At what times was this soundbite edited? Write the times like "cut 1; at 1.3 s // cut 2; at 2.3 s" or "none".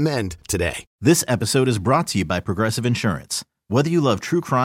cut 1; at 0.9 s